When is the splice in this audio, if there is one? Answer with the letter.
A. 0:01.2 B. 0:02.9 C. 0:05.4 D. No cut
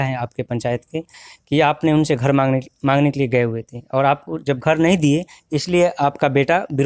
D